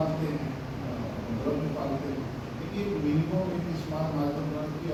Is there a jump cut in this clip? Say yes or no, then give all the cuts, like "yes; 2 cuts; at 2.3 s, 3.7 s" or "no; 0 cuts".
no; 0 cuts